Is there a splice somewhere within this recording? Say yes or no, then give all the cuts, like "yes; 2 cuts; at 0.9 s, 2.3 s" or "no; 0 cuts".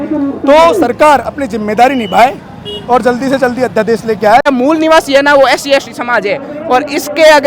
yes; 1 cut; at 4.5 s